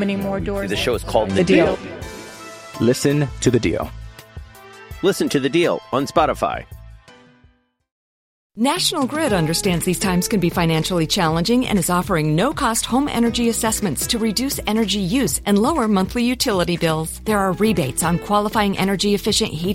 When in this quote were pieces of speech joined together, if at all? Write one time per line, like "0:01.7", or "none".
0:08.5